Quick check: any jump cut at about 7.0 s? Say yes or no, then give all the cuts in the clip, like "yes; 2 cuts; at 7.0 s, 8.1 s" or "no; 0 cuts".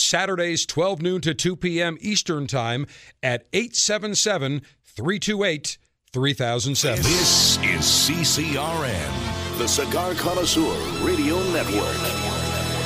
yes; 1 cut; at 7.0 s